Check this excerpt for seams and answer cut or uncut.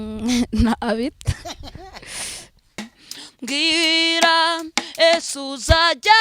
cut